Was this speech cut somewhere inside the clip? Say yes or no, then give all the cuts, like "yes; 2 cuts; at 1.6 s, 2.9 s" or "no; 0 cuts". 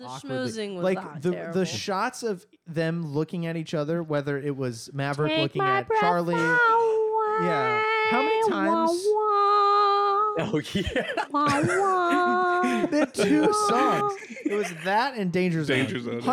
no; 0 cuts